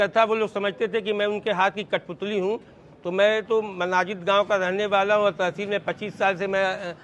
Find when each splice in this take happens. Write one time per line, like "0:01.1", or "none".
none